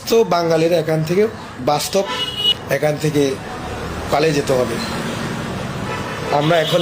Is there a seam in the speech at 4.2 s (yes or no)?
no